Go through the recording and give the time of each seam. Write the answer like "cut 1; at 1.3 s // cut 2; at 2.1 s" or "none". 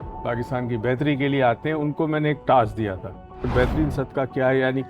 cut 1; at 3.5 s